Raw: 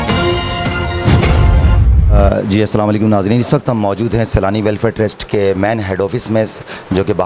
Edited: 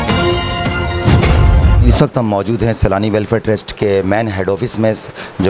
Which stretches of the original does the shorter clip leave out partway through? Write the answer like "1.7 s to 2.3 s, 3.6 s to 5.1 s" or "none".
1.9 s to 3.4 s